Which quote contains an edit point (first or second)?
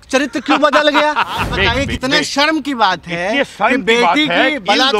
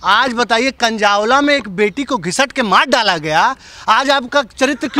first